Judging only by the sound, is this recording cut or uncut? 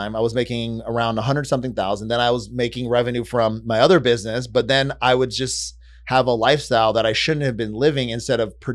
uncut